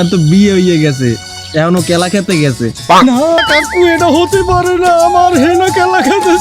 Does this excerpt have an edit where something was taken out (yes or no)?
yes